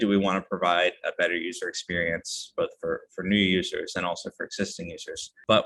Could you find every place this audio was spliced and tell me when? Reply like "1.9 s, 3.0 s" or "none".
none